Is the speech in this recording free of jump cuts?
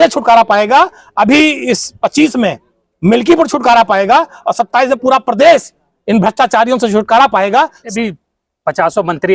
no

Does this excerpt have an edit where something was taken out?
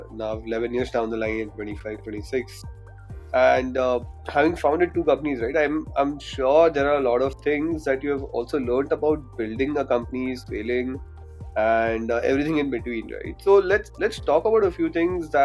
no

